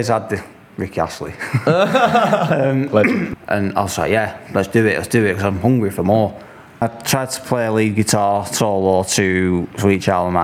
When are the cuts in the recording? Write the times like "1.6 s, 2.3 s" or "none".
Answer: 3.3 s, 6.8 s